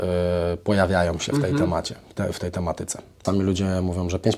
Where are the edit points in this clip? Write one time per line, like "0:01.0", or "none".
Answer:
0:03.2